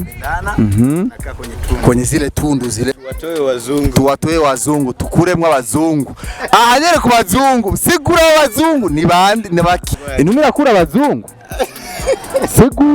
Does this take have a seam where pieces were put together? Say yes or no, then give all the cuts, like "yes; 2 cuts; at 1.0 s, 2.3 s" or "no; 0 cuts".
yes; 2 cuts; at 2.9 s, 10.0 s